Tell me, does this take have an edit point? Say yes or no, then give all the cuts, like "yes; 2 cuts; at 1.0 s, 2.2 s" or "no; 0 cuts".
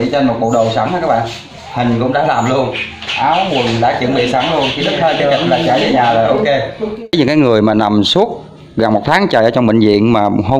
yes; 1 cut; at 7.1 s